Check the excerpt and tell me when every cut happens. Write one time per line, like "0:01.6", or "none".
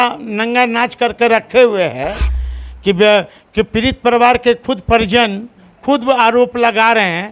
none